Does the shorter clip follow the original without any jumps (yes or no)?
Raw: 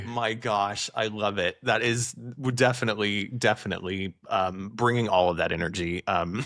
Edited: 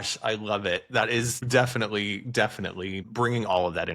no